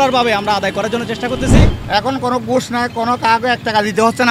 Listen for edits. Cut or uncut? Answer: cut